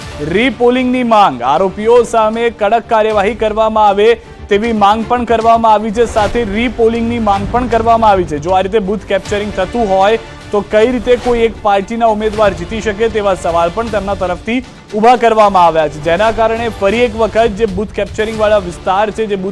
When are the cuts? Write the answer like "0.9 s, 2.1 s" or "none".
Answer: 16.3 s